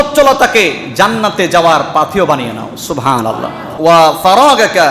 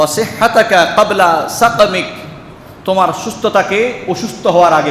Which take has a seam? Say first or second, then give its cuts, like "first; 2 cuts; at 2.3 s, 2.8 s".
first; 1 cut; at 3.7 s